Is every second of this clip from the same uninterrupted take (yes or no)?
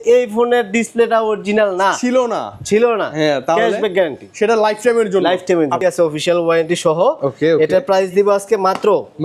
no